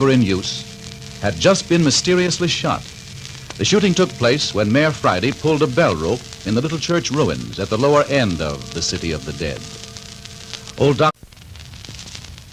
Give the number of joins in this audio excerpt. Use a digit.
0